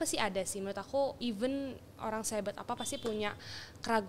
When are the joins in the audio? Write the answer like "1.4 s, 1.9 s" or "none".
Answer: 1.2 s

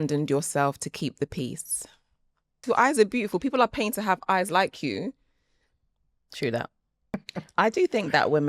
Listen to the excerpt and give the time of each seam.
2.5 s, 6.9 s

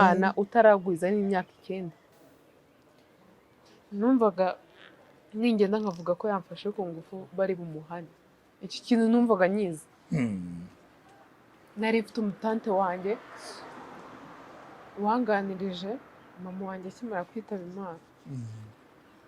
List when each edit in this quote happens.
2.1 s

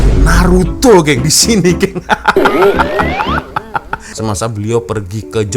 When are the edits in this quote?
4.1 s

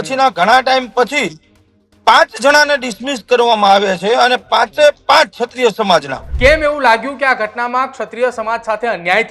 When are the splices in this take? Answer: 6.2 s

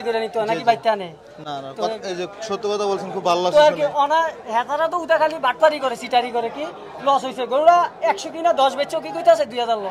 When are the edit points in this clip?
none

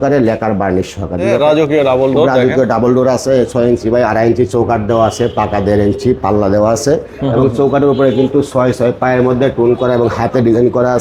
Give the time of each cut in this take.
1.3 s

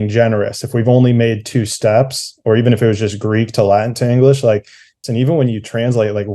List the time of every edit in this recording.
5.0 s

